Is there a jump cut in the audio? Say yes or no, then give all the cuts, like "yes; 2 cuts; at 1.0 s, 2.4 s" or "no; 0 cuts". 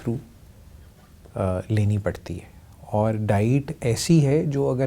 no; 0 cuts